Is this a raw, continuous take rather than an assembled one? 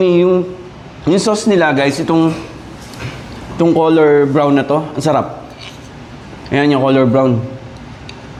yes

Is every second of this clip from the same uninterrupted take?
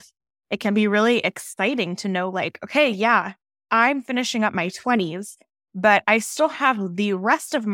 yes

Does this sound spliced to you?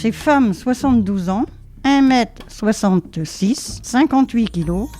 yes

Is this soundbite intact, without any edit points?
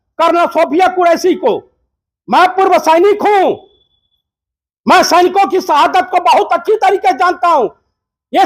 yes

